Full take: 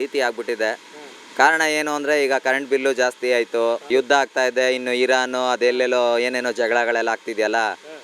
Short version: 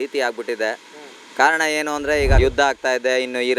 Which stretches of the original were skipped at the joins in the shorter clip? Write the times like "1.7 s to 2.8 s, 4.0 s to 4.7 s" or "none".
2.4 s to 3.9 s